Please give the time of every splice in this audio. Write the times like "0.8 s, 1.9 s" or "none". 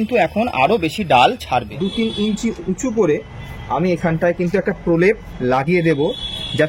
1.7 s

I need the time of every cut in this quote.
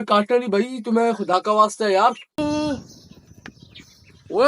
2.4 s

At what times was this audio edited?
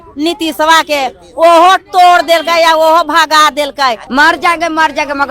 4.0 s

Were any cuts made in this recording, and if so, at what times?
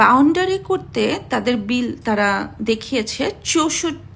none

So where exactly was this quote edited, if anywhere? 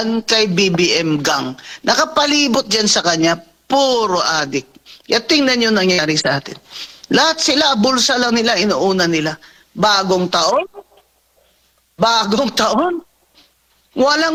none

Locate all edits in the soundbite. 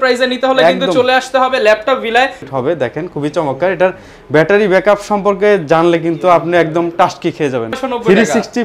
2.4 s, 7.8 s

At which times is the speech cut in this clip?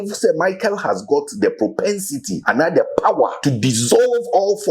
2.3 s, 3.4 s

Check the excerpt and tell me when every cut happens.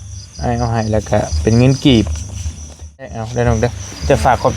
3.2 s

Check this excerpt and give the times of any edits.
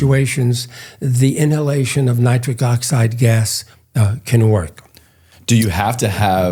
none

